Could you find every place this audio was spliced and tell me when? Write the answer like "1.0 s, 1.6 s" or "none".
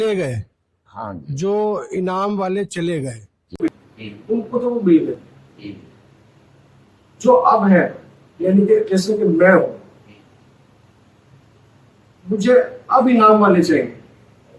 3.7 s

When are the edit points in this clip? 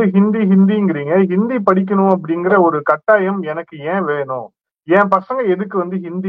none

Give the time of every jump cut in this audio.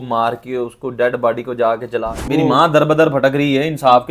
2.1 s

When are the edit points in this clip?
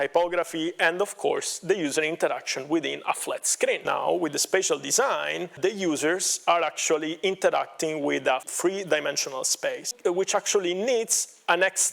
3.8 s, 5.5 s, 8.5 s, 9.9 s

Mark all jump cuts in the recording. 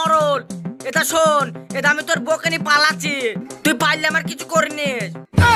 none

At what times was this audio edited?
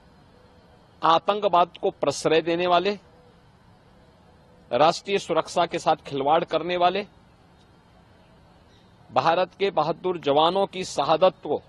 none

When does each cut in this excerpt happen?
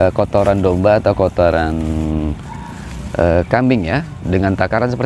none

